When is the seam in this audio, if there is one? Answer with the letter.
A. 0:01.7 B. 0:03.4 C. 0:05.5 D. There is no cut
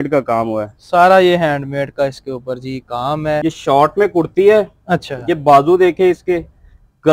B